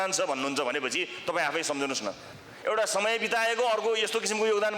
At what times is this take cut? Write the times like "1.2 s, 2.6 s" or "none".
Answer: 2.3 s